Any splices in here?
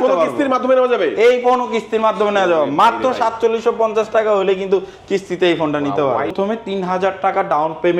yes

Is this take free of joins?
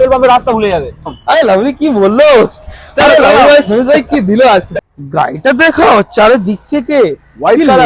no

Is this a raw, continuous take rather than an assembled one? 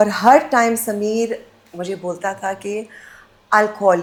yes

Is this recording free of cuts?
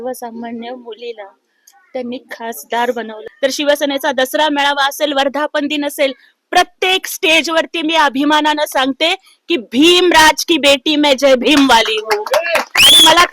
no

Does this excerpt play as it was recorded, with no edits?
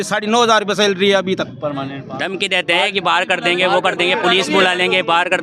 no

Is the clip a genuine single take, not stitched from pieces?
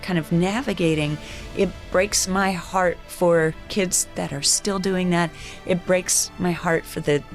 yes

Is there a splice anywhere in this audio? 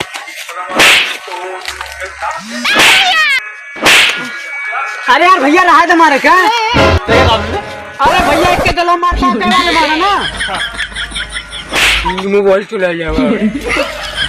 yes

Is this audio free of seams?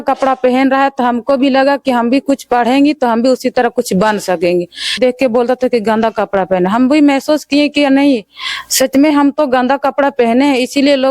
no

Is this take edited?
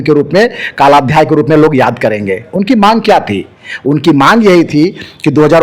no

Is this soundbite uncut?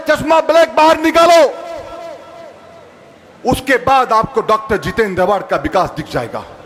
yes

